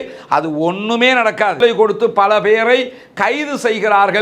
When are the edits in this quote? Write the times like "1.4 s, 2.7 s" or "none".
1.6 s